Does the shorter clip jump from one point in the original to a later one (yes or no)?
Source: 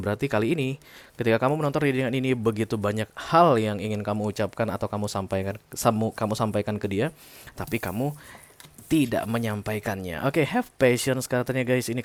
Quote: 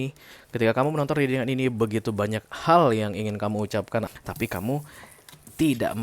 yes